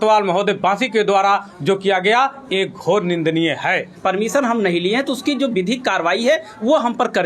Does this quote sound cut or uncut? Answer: cut